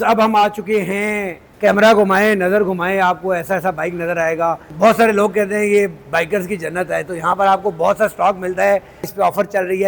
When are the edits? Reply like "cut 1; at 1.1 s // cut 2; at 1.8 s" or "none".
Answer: cut 1; at 1.4 s // cut 2; at 4.7 s // cut 3; at 9.1 s

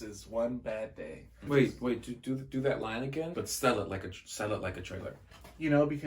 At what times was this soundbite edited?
cut 1; at 1.4 s // cut 2; at 3.3 s

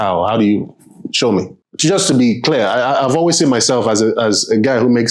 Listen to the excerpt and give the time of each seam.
cut 1; at 1.6 s

